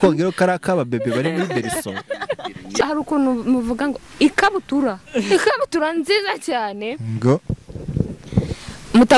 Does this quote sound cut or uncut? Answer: cut